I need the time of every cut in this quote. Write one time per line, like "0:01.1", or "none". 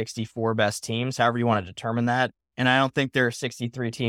0:02.5